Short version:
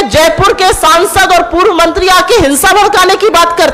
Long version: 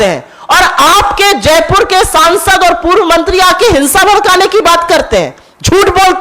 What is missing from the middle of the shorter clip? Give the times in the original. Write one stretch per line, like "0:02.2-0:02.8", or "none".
none